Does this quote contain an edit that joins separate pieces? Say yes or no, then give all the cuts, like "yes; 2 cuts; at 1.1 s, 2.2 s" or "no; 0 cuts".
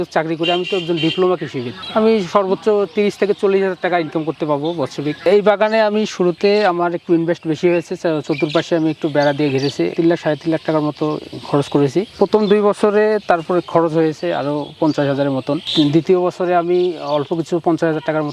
yes; 1 cut; at 5.2 s